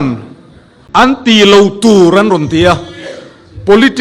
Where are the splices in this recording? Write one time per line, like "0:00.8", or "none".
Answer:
0:01.0